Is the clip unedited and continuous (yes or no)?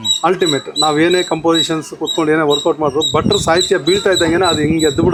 yes